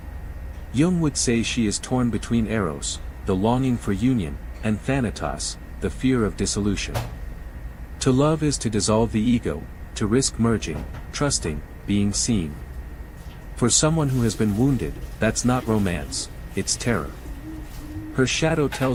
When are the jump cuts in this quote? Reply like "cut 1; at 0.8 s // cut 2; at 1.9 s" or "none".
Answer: none

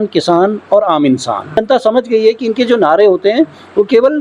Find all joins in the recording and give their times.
cut 1; at 1.6 s

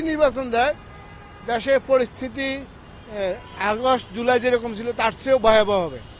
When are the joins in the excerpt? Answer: none

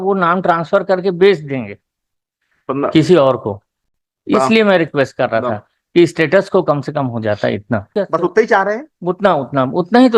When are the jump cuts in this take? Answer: cut 1; at 7.9 s

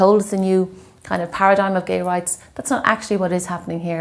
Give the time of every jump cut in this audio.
none

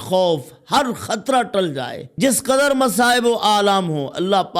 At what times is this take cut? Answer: cut 1; at 2.0 s

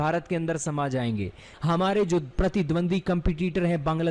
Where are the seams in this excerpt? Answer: cut 1; at 1.5 s

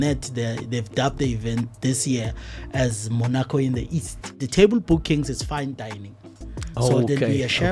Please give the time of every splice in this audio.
cut 1; at 4.4 s

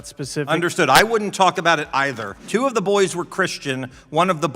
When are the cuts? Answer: cut 1; at 2.3 s

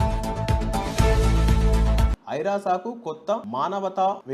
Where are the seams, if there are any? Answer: cut 1; at 2.0 s

